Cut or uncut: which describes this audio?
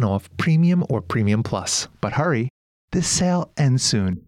cut